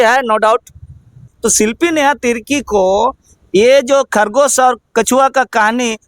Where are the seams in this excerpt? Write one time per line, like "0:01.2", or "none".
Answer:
0:01.3